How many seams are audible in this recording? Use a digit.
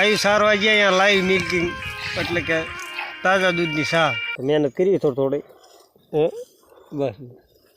1